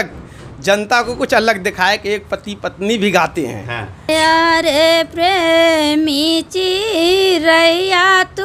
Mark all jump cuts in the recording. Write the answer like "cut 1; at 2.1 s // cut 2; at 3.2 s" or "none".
cut 1; at 4.1 s